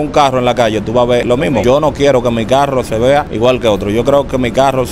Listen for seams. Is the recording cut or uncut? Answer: cut